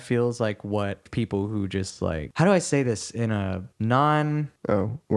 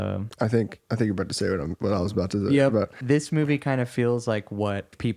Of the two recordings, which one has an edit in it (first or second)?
second